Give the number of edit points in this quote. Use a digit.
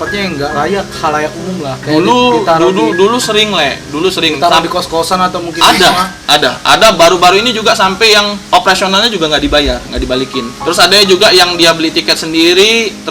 4